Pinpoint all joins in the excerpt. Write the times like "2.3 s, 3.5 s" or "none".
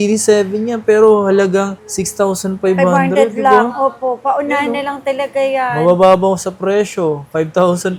none